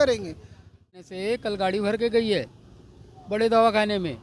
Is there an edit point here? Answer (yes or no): yes